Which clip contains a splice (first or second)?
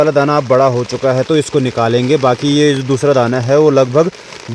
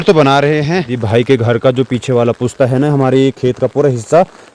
second